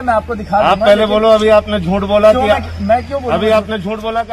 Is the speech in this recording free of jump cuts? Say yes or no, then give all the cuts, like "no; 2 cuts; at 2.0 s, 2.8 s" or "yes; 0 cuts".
yes; 0 cuts